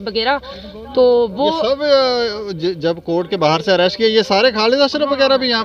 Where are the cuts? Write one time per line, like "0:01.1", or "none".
none